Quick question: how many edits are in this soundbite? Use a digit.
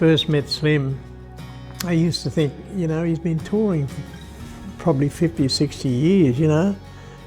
0